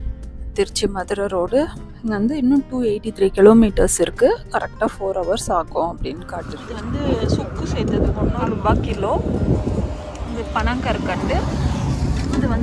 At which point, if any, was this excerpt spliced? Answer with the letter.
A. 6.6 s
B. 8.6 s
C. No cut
A